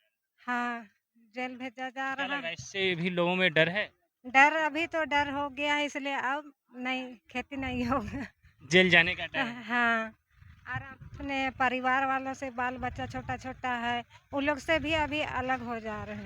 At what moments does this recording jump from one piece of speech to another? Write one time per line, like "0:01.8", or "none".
none